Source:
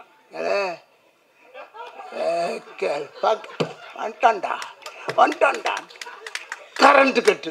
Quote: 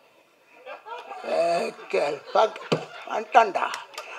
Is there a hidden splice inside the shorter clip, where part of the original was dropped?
no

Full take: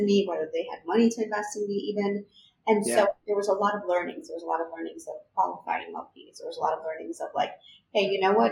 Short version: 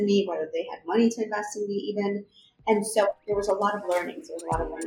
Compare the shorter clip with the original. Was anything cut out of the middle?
no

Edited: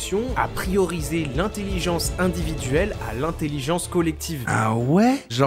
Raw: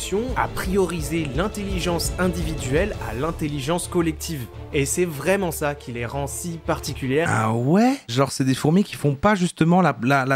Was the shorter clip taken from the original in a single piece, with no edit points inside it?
no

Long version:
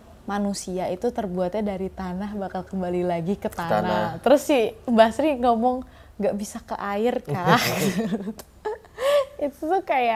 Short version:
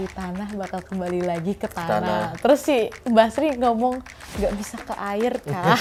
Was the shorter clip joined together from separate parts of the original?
no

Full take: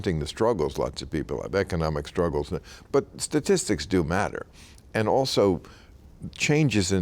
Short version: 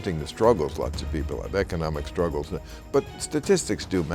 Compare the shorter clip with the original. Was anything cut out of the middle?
no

